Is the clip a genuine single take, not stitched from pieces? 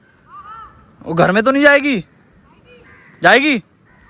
yes; 0 cuts

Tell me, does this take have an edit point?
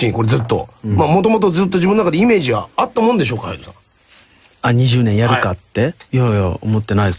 no; 0 cuts

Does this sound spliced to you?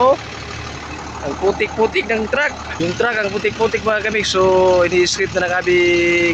yes; 1 cut; at 2.7 s

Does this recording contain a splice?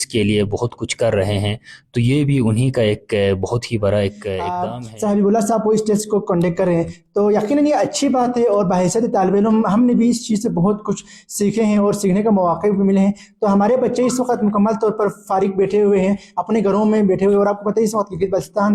yes; 1 cut; at 4.5 s

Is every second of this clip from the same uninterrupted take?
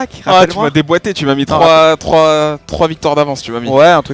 yes; 0 cuts

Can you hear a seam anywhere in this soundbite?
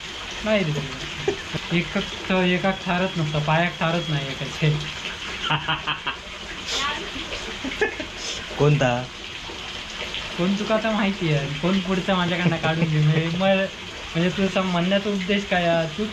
no; 0 cuts

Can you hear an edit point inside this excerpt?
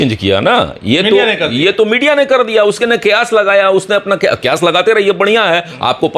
no; 0 cuts

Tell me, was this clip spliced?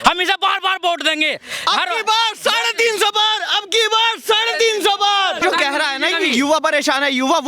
yes; 1 cut; at 5.4 s

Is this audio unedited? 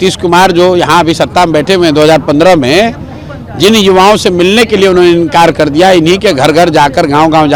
yes; 0 cuts

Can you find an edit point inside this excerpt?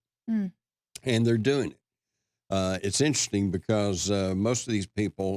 no; 0 cuts

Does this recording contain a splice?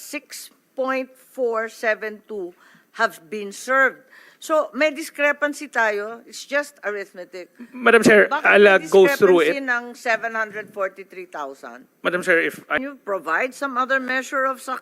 yes; 1 cut; at 12.8 s

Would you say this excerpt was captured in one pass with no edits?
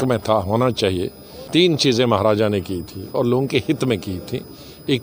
no; 1 cut; at 1.5 s

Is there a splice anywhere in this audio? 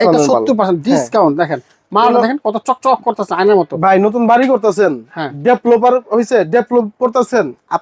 no; 0 cuts

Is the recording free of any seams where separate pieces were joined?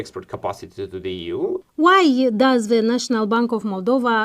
no; 1 cut; at 1.6 s

